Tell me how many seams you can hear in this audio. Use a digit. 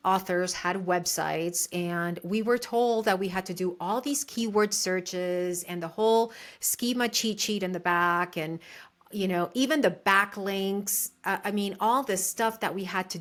0